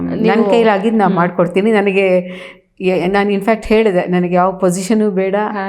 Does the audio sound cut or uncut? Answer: uncut